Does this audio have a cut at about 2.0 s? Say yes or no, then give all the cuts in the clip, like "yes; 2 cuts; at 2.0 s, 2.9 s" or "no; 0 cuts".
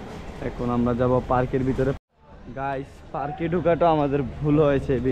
yes; 1 cut; at 2.0 s